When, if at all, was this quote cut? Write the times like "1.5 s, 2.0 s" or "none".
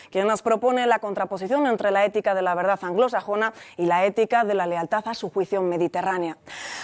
1.7 s

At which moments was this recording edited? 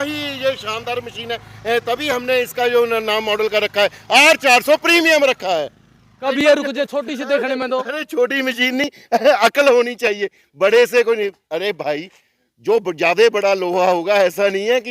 6.2 s

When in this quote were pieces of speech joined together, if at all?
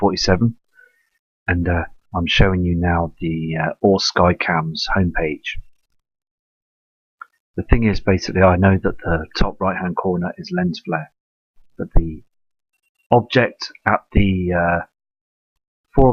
none

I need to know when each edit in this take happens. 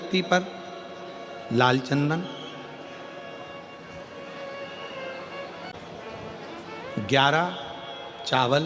5.8 s

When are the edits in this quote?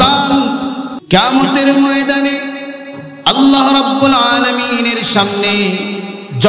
0.9 s

